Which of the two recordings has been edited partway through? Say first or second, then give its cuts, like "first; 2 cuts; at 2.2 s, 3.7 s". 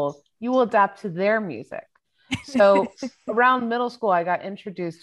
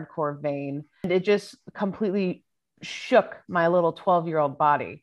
second; 1 cut; at 1.1 s